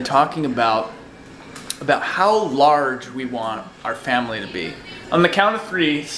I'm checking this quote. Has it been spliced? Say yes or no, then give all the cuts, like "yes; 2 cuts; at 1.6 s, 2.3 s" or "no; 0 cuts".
no; 0 cuts